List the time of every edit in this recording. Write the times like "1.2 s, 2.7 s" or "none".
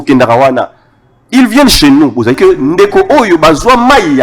2.4 s